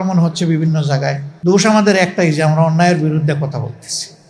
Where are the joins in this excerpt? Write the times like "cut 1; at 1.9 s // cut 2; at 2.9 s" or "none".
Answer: cut 1; at 1.3 s

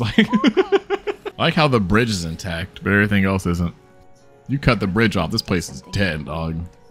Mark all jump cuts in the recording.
cut 1; at 1.2 s

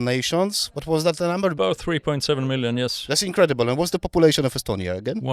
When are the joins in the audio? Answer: cut 1; at 1.5 s

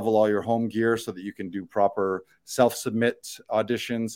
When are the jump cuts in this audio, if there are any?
none

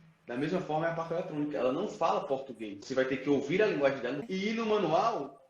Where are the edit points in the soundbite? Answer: cut 1; at 2.7 s // cut 2; at 4.2 s

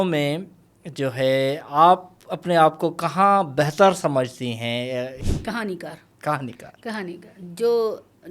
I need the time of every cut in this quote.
cut 1; at 5.3 s

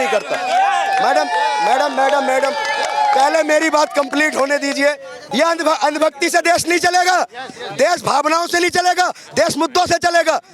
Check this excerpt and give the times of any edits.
cut 1; at 5.1 s

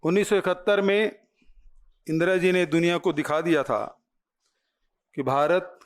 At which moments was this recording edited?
none

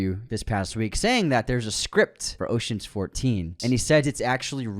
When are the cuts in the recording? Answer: cut 1; at 2.2 s // cut 2; at 3.5 s

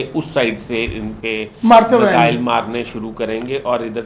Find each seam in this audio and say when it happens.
none

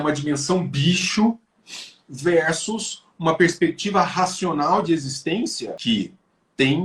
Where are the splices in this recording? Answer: cut 1; at 5.8 s

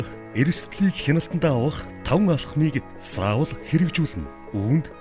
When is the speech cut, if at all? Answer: none

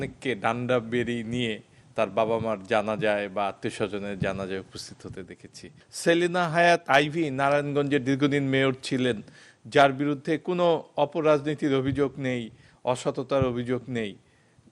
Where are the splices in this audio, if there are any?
cut 1; at 5.8 s

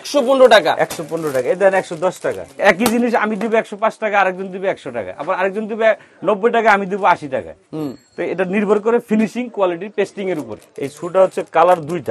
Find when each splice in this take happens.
cut 1; at 2.6 s // cut 2; at 10.6 s

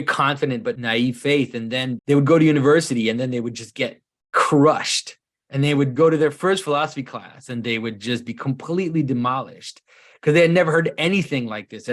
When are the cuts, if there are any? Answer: cut 1; at 0.8 s // cut 2; at 2.0 s // cut 3; at 5.9 s

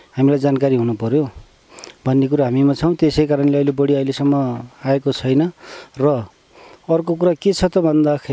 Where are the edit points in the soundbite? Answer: none

